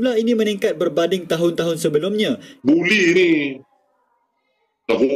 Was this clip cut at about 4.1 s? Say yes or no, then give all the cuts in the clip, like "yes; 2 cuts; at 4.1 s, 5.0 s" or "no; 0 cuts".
no; 1 cut; at 2.5 s